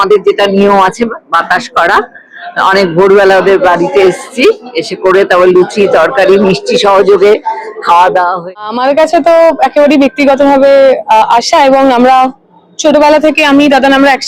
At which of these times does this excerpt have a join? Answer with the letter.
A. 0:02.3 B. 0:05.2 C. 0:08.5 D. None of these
C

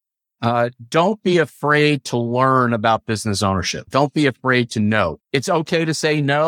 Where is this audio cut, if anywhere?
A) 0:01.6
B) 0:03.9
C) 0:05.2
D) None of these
C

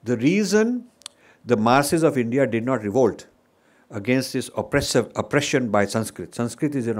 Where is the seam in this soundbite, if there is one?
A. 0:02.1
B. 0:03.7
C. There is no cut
C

